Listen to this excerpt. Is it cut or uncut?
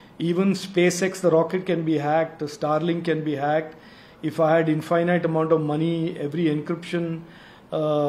uncut